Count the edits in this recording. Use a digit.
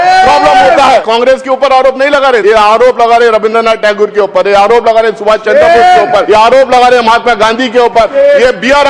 4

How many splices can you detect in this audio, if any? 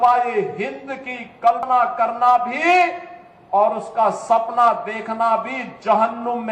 1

